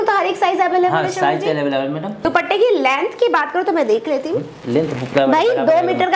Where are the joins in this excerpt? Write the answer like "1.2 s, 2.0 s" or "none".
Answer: 2.2 s